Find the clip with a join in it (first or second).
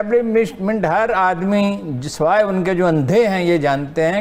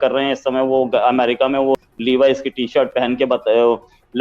second